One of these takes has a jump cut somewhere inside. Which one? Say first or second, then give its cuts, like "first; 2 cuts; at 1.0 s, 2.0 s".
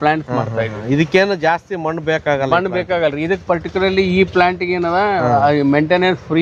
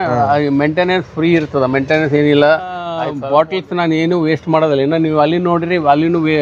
second; 1 cut; at 3.0 s